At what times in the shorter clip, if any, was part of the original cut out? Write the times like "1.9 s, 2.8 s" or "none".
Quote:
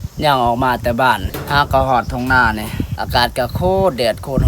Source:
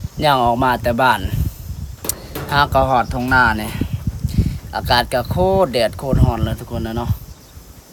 1.3 s, 2.9 s